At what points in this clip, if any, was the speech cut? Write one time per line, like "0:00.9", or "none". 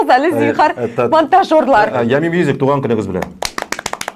0:01.9